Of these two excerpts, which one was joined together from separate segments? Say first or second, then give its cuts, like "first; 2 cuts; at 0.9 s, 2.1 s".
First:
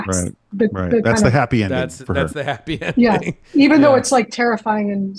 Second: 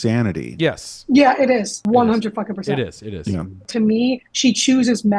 second; 2 cuts; at 1.7 s, 3.7 s